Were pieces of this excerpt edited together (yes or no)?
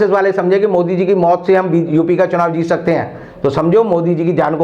no